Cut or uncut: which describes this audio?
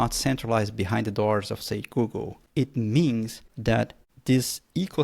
cut